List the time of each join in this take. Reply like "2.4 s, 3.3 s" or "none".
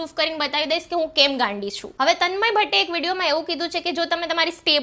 none